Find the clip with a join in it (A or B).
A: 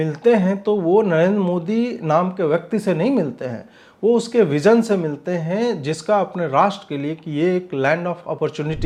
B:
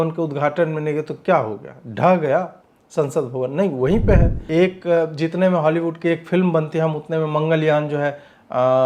B